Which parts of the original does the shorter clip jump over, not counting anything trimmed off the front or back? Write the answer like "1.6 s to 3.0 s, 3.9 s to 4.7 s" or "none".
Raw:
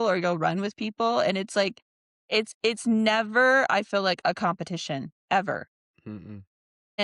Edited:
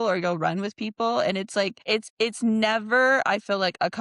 1.8 s to 2.2 s